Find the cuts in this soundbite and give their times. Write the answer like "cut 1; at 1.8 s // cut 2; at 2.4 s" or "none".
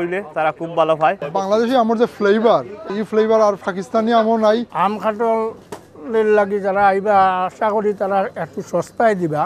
cut 1; at 1.2 s // cut 2; at 2.8 s // cut 3; at 4.7 s